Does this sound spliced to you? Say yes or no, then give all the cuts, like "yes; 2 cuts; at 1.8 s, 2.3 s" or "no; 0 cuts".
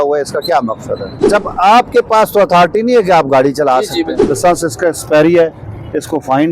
yes; 2 cuts; at 1.1 s, 4.2 s